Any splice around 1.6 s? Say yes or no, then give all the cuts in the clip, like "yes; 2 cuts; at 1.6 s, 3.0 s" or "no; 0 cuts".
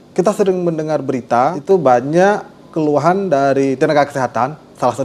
yes; 1 cut; at 1.6 s